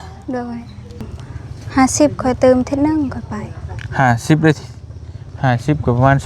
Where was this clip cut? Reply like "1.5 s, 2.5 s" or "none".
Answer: 1.0 s